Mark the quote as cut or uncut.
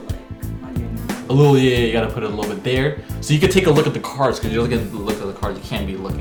uncut